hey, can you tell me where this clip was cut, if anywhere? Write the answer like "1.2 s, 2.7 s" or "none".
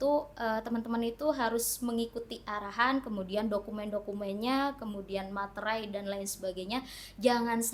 none